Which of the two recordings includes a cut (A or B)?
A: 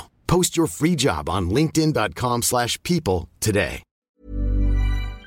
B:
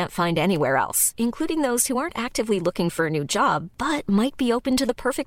A